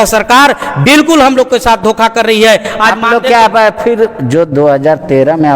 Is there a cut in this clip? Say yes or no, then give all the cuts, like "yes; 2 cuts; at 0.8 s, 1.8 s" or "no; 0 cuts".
no; 0 cuts